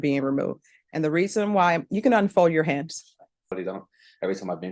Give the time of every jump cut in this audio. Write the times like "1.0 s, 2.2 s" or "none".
3.5 s